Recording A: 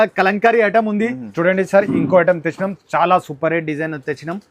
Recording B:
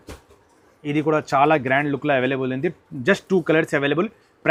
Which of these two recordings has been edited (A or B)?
A